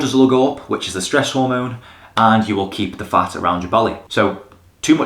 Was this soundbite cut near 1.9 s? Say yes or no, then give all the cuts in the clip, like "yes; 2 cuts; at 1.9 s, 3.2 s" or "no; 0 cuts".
no; 1 cut; at 4.0 s